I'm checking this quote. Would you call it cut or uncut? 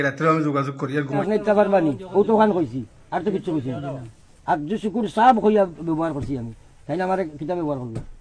cut